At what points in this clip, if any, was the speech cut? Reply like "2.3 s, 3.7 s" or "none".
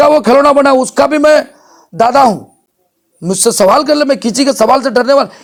none